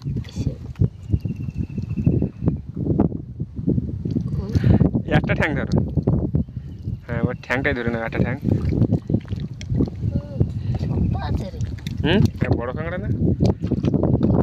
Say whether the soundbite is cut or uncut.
cut